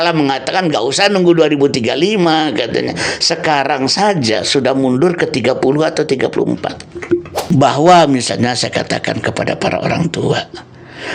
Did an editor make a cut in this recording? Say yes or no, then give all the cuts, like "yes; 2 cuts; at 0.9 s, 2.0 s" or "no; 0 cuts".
yes; 1 cut; at 7.4 s